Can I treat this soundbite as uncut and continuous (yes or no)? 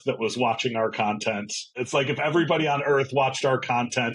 no